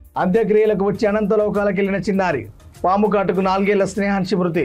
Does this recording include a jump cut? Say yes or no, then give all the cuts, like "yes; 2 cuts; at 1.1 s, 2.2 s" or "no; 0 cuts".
no; 0 cuts